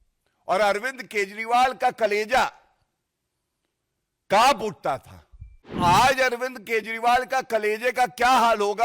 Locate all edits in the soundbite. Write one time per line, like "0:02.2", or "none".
0:05.7